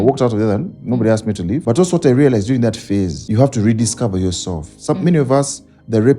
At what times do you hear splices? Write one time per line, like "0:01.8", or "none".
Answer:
0:01.6
0:03.2